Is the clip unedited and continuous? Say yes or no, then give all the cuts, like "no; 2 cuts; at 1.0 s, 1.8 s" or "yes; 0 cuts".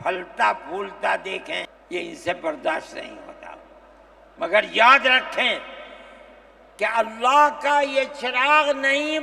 no; 1 cut; at 1.7 s